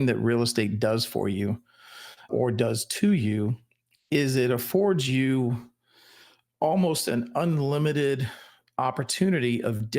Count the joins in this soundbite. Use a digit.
1